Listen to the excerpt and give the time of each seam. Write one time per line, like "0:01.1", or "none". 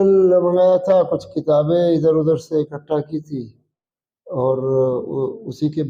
none